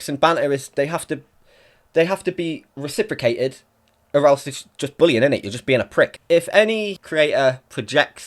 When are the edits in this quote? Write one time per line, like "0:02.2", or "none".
0:02.7
0:06.2
0:07.0